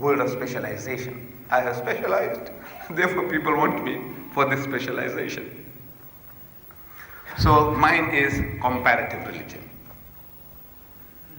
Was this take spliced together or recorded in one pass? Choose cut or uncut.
cut